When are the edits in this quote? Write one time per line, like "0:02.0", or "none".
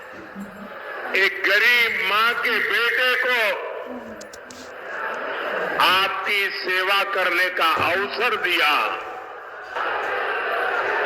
0:09.8